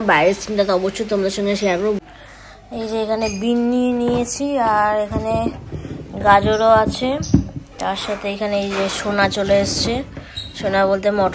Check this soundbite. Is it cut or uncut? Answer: cut